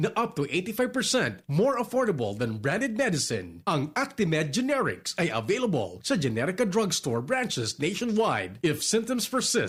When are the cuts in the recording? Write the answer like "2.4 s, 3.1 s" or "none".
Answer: none